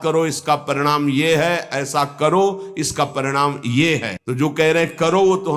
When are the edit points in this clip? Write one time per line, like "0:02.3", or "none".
0:04.2